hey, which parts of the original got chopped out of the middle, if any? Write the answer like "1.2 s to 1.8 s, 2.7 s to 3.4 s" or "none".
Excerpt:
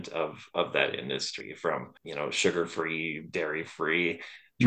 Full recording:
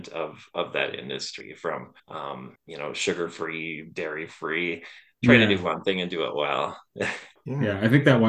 2.0 s to 2.6 s